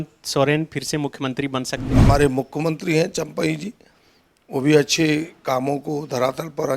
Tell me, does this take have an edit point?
yes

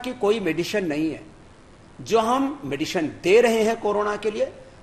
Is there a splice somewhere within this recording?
no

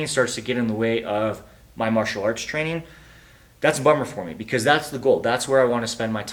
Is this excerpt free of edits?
yes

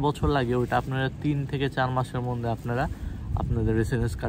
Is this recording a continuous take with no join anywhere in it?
yes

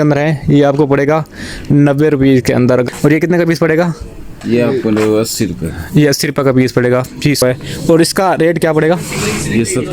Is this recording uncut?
no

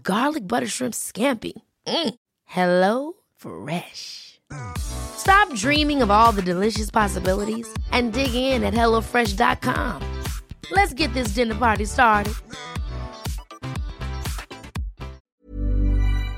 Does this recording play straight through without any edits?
no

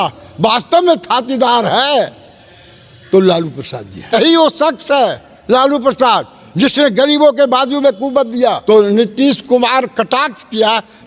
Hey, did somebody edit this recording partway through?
yes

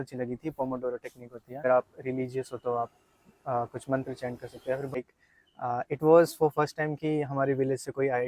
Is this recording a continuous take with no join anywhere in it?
no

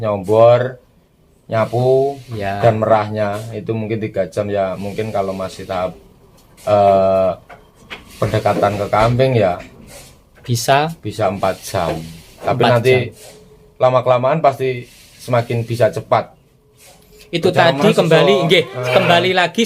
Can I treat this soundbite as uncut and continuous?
yes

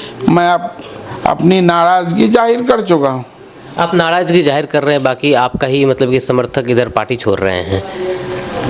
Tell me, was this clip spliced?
no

